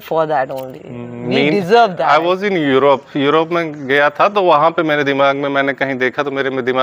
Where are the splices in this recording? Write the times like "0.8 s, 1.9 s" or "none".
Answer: 2.0 s